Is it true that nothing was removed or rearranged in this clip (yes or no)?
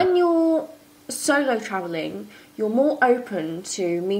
yes